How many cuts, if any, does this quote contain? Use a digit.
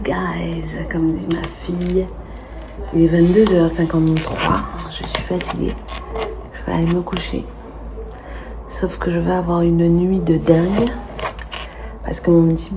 0